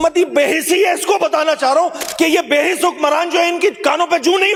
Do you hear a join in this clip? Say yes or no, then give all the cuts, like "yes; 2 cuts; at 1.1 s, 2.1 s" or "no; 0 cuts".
no; 0 cuts